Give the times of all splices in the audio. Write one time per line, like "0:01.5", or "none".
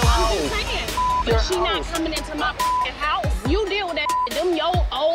none